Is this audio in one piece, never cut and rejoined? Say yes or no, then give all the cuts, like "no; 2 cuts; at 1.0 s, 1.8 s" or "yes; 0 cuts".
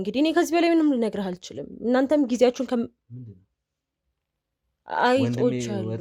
yes; 0 cuts